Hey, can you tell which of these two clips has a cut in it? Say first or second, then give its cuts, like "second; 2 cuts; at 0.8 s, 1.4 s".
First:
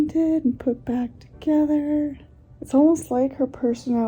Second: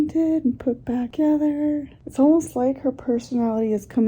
second; 2 cuts; at 1.1 s, 2.0 s